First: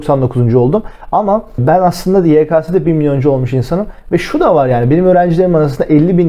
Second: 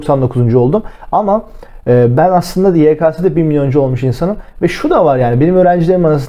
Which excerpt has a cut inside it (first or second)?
first